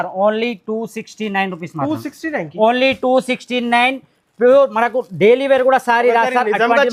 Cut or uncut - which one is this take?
uncut